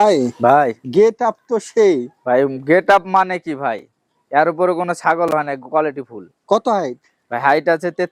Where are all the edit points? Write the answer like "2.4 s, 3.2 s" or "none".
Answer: none